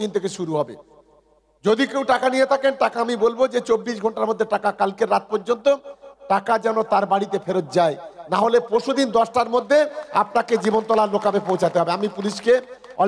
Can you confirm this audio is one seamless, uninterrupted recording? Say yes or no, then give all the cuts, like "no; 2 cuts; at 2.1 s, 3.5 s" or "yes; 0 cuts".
yes; 0 cuts